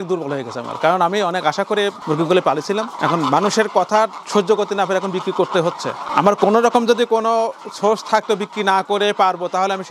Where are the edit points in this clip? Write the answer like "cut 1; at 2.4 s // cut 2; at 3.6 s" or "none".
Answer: none